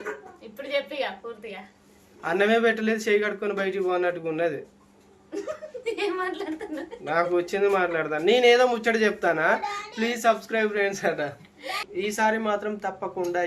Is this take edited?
yes; 1 cut; at 11.8 s

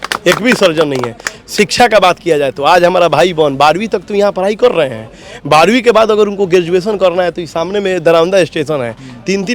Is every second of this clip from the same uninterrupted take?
yes; 0 cuts

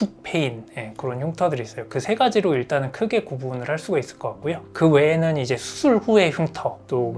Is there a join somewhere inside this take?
no; 0 cuts

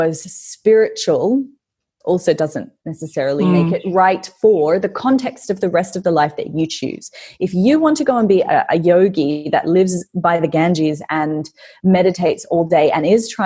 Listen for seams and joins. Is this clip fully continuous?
yes; 0 cuts

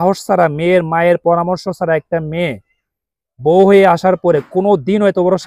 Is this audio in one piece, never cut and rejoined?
yes; 0 cuts

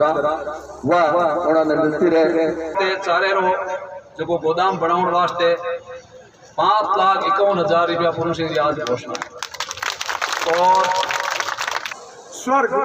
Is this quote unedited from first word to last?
no; 2 cuts; at 2.7 s, 11.8 s

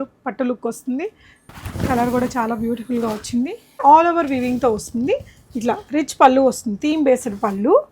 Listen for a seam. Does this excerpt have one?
yes; 2 cuts; at 1.4 s, 3.8 s

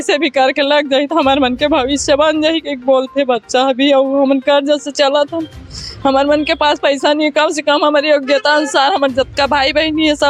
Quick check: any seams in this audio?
no; 0 cuts

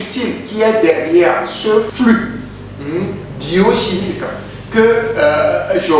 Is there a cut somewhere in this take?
yes; 1 cut; at 1.9 s

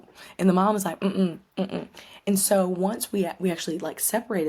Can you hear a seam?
no; 0 cuts

